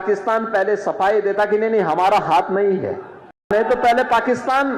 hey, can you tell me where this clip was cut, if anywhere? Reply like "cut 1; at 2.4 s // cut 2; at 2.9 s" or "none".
cut 1; at 3.5 s